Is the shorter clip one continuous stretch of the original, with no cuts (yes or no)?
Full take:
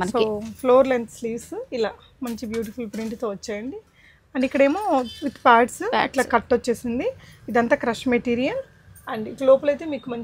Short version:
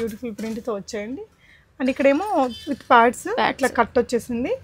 yes